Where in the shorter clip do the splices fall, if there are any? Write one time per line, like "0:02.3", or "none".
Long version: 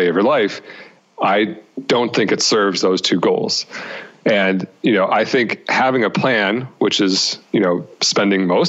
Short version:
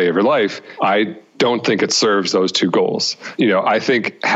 0:01.1
0:03.2

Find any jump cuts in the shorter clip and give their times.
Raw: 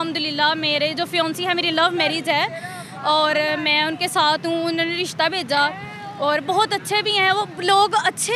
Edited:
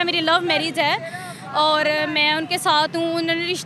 none

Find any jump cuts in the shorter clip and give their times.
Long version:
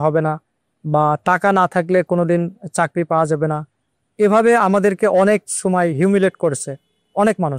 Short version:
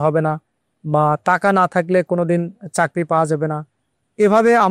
none

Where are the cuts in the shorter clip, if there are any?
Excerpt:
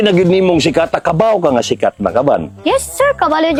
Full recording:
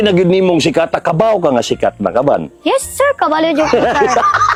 none

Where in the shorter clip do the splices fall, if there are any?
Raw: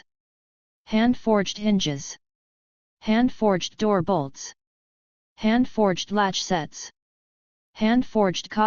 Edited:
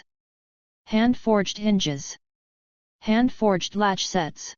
0:03.6

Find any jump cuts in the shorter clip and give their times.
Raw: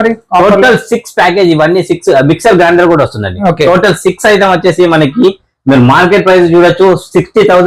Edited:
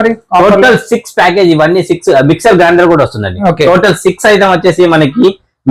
none

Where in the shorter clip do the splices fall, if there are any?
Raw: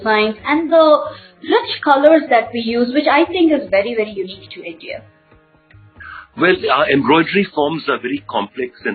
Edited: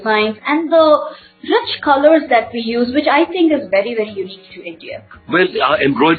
0:05.1

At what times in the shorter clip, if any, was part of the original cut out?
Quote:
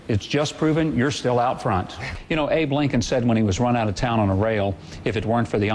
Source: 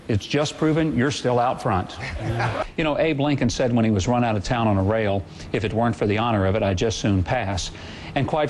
0:02.2

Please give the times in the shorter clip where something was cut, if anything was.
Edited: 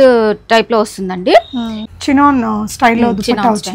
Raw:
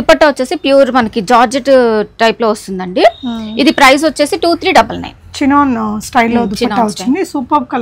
0:01.7

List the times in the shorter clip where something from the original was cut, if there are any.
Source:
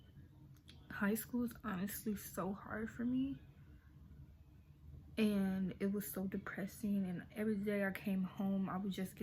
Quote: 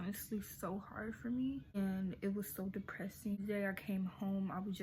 0:01.8
0:03.4

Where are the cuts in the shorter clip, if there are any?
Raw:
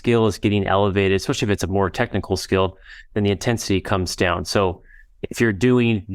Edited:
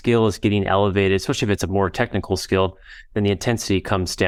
none

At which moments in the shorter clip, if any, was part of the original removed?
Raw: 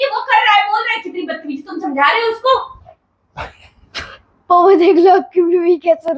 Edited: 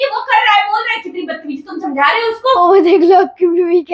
0:02.6

